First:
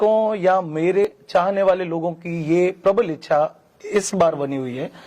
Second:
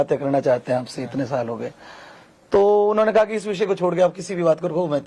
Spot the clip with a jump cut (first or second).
first